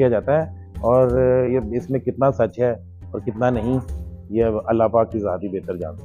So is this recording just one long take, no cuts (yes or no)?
yes